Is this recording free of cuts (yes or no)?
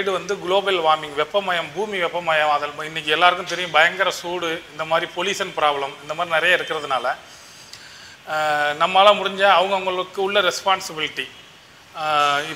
yes